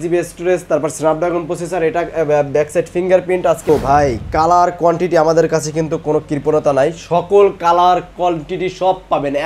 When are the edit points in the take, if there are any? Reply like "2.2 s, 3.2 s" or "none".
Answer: 3.7 s